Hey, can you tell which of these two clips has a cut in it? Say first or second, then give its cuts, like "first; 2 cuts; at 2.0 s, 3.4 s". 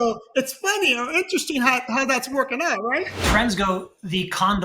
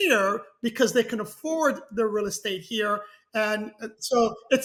first; 1 cut; at 3.2 s